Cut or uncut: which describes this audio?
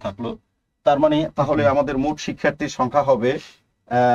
uncut